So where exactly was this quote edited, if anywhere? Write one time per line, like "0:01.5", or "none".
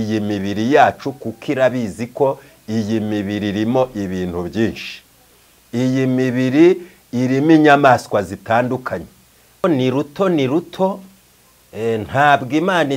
0:09.6